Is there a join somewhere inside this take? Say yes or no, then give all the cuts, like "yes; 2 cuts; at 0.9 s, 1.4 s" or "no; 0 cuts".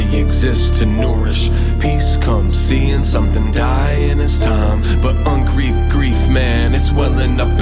no; 0 cuts